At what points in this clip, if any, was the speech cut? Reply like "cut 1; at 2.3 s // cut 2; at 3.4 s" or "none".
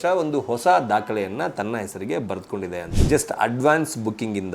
cut 1; at 2.9 s